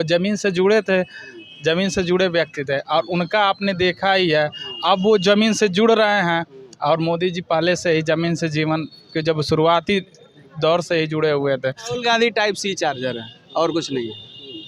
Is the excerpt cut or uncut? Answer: cut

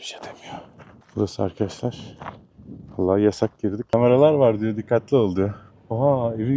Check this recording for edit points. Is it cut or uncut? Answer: cut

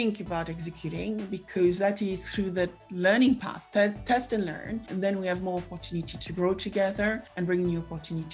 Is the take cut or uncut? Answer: cut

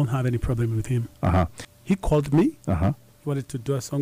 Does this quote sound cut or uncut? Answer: cut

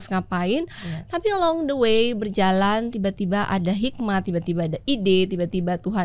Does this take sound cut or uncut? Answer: uncut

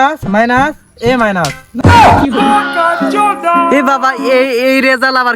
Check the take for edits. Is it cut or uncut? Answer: uncut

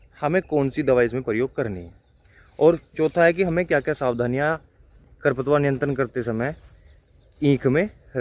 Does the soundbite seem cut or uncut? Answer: uncut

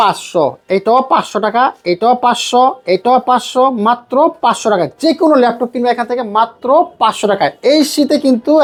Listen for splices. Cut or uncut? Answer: uncut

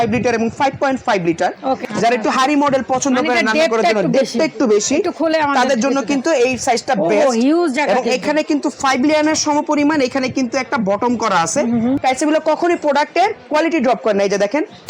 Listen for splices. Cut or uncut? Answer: cut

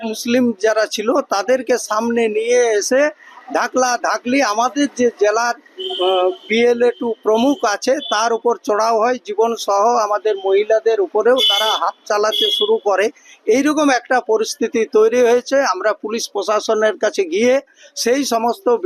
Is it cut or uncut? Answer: uncut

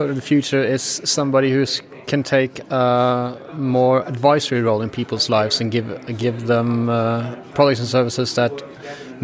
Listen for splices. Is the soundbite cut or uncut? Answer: uncut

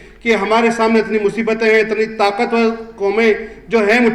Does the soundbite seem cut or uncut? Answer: uncut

